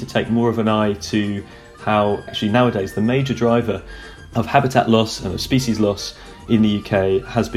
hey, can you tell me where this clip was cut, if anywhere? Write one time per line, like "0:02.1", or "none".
0:02.3